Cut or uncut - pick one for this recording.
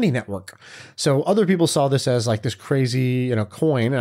uncut